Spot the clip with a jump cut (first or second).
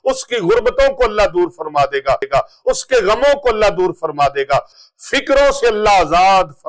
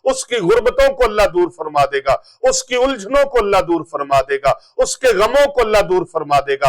first